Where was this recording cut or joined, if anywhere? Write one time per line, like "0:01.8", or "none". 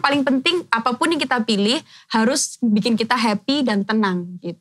none